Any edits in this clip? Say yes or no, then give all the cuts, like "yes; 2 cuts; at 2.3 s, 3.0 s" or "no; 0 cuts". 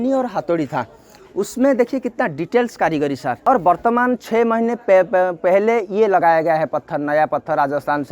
yes; 1 cut; at 3.4 s